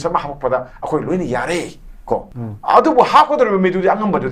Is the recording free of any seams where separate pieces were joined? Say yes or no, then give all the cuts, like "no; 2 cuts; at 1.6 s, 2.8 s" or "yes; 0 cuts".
no; 1 cut; at 2.4 s